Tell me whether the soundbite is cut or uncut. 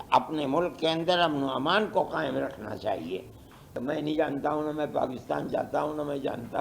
cut